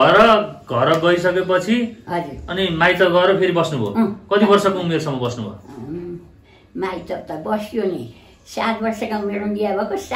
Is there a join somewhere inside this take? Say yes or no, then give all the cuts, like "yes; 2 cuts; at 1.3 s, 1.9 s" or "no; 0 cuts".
no; 0 cuts